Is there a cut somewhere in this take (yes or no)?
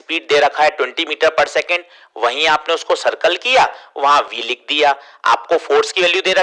no